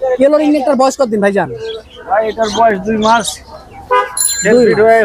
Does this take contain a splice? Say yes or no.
no